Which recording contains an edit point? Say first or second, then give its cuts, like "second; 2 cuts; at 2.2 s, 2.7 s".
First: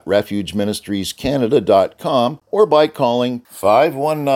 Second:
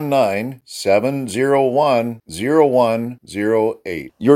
first; 1 cut; at 2.4 s